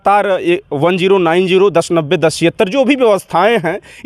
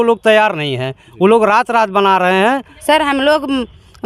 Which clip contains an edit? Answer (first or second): second